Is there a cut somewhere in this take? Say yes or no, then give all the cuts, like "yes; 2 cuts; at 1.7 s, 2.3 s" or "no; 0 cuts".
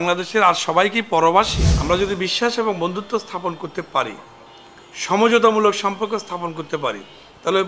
yes; 1 cut; at 1.6 s